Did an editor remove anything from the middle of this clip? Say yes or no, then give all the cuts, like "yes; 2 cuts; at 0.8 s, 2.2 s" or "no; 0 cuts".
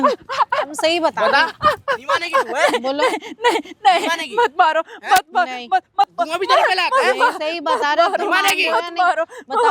no; 0 cuts